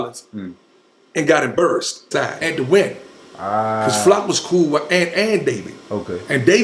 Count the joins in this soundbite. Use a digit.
1